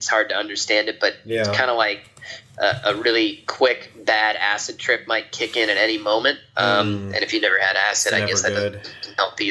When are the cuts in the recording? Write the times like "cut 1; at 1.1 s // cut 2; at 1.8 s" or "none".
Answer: none